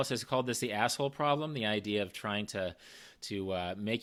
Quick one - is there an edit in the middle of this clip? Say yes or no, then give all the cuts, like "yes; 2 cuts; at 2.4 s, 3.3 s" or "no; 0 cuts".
no; 0 cuts